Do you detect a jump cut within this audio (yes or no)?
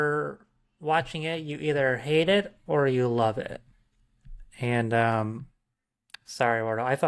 no